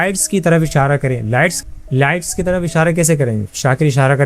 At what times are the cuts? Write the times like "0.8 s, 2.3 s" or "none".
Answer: 1.6 s